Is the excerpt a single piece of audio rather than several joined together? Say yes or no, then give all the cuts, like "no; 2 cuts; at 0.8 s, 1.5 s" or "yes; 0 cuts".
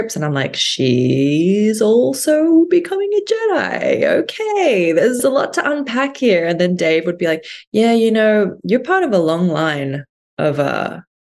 no; 1 cut; at 5.2 s